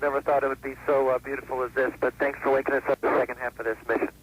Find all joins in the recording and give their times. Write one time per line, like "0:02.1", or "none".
0:03.0